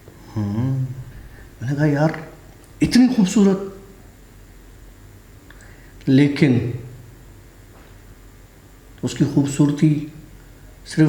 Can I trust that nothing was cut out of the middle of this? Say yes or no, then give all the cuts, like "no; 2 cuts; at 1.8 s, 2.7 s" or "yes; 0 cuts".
yes; 0 cuts